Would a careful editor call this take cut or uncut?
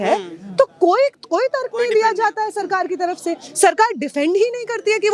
uncut